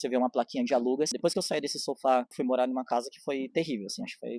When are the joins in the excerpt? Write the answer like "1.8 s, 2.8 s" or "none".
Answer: 1.1 s, 2.3 s